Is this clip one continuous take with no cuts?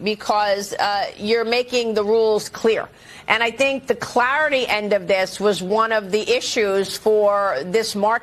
no; 1 cut; at 3.5 s

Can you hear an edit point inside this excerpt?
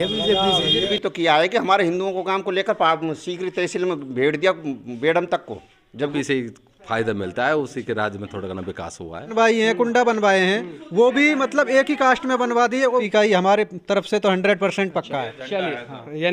yes; 4 cuts; at 0.9 s, 6.1 s, 9.3 s, 13.1 s

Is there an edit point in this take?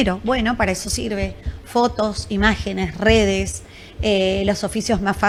no; 0 cuts

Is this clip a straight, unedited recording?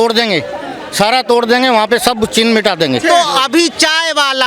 no; 1 cut; at 3.0 s

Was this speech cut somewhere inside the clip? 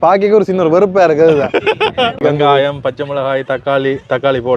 yes; 1 cut; at 2.2 s

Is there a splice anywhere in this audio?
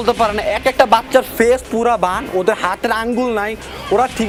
no; 0 cuts

